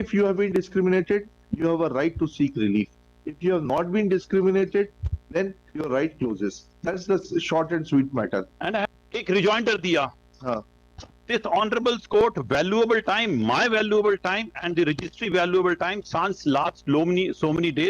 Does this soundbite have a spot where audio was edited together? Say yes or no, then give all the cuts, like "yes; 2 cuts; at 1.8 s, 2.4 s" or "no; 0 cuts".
yes; 1 cut; at 8.8 s